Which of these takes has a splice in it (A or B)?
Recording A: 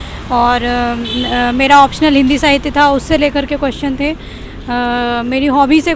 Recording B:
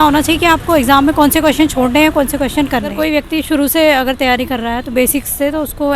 B